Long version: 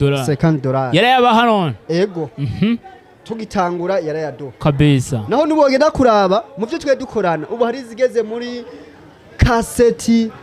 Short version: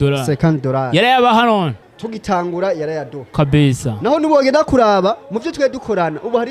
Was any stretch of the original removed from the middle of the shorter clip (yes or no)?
yes